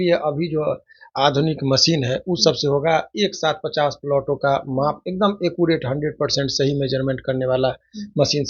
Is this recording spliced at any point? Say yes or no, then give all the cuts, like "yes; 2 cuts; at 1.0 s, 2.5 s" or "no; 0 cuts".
no; 0 cuts